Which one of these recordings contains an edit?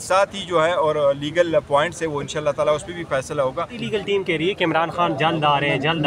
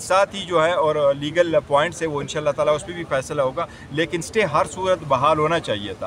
first; 1 cut; at 3.8 s

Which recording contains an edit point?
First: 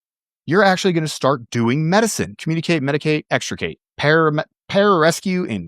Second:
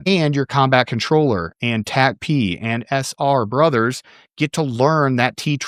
first; 2 cuts; at 2.4 s, 3.8 s

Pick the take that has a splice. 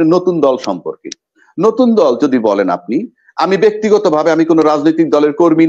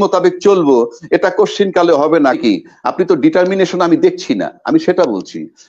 second; 1 cut; at 2.4 s

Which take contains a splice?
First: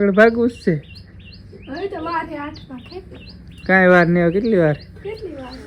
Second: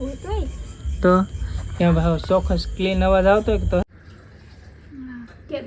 second; 1 cut; at 3.8 s

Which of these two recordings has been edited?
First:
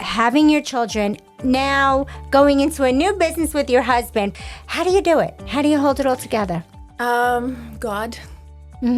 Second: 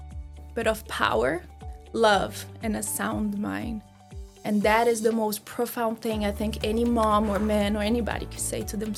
first; 1 cut; at 4.3 s

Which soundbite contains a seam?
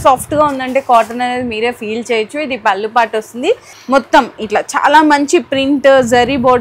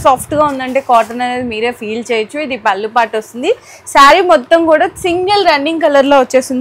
first; 1 cut; at 3.7 s

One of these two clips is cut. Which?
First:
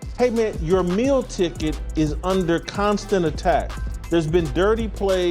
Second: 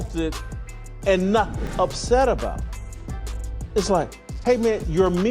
second; 1 cut; at 1.7 s

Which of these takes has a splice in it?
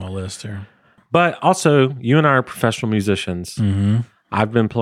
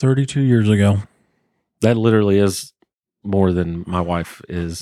first; 1 cut; at 1.0 s

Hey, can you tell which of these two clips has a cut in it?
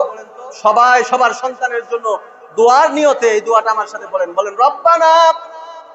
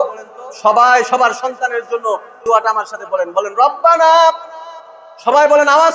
second; 1 cut; at 2.4 s

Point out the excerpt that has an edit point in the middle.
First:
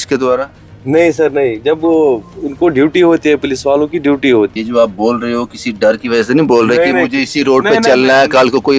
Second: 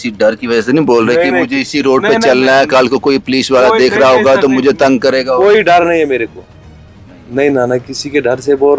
first; 1 cut; at 4.5 s

